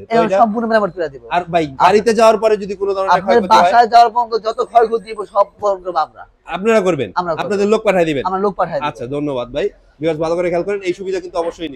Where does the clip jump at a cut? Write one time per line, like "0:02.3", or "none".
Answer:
none